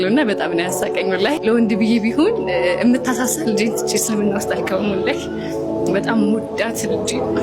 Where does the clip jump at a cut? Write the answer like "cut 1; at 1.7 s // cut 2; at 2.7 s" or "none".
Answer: none